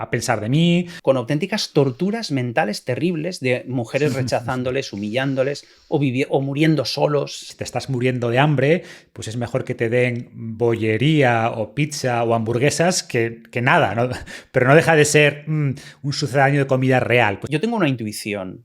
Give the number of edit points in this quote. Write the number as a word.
three